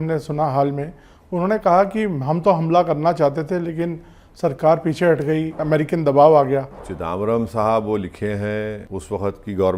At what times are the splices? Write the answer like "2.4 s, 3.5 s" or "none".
5.6 s, 6.9 s, 8.9 s